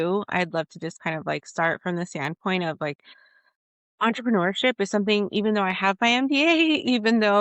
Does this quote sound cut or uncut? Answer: uncut